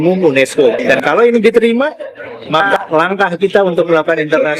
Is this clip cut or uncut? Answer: cut